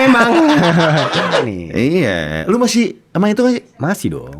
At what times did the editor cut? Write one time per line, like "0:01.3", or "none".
0:01.4